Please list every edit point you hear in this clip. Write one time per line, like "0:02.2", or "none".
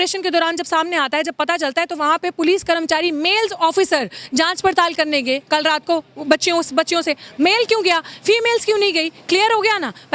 none